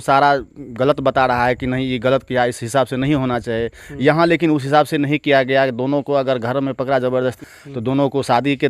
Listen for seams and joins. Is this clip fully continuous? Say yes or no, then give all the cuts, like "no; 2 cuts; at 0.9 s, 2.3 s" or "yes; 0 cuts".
no; 1 cut; at 7.5 s